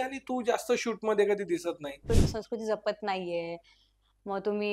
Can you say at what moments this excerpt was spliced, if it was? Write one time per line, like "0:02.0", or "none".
0:02.0

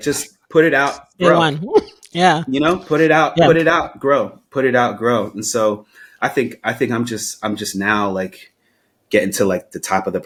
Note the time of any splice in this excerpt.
none

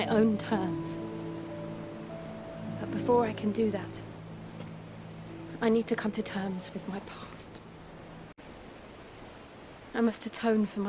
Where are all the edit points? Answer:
0:08.4

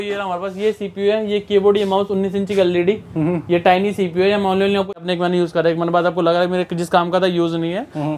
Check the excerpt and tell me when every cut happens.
0:04.9

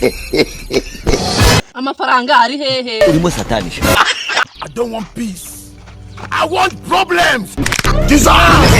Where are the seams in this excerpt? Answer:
0:00.9
0:04.0

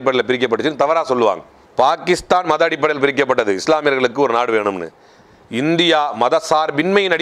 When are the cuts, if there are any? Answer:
none

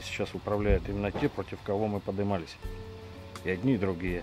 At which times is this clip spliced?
0:01.5

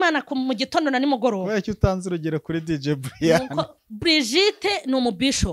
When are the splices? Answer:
0:03.8

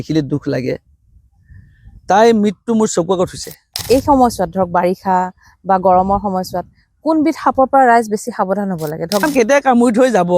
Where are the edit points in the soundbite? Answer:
0:03.8
0:09.3

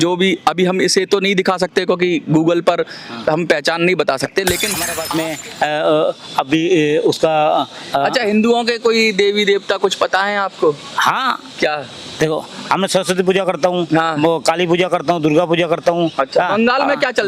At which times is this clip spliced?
0:05.0

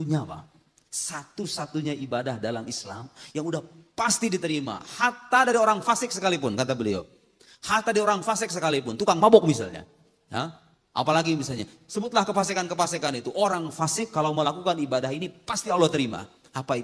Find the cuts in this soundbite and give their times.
none

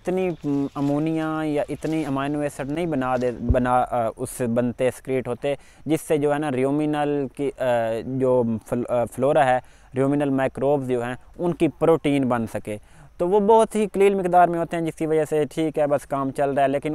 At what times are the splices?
none

